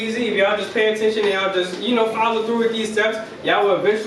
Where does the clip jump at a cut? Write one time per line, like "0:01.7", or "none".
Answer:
none

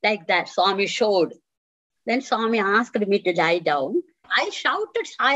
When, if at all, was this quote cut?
0:04.3

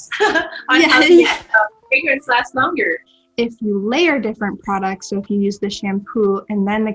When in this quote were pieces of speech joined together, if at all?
0:03.2

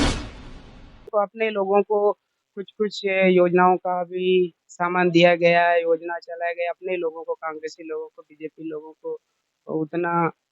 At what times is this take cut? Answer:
0:01.1

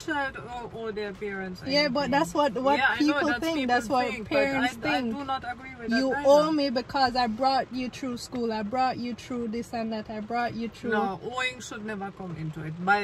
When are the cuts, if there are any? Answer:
none

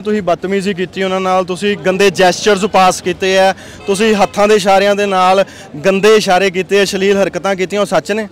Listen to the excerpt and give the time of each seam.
none

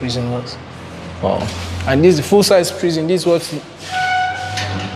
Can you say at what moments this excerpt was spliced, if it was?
none

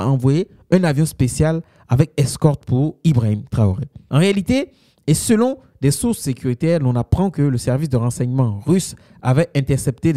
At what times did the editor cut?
0:04.0

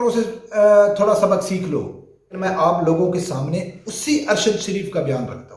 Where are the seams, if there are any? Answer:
0:02.4

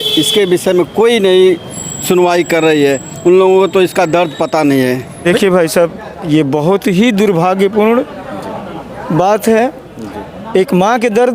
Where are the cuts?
0:05.1

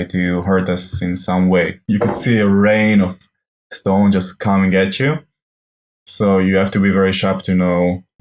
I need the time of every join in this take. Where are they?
0:01.8

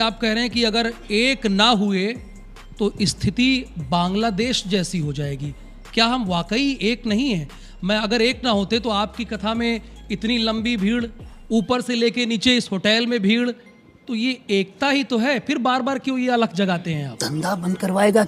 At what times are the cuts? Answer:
0:17.3

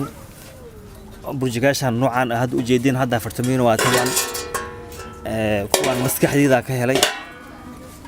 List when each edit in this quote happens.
none

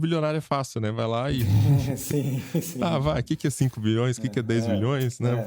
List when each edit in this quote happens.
none

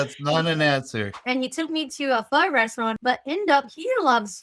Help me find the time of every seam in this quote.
0:01.1
0:03.0

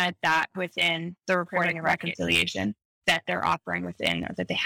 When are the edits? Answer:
0:02.0
0:03.0

